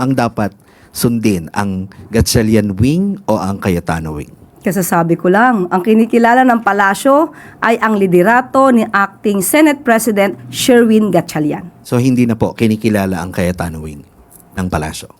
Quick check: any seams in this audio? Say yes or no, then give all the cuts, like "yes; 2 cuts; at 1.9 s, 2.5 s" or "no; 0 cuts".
yes; 1 cut; at 11.7 s